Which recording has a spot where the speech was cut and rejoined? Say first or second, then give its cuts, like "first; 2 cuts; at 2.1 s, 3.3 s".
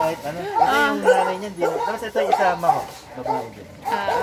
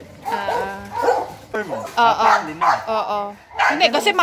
second; 1 cut; at 1.5 s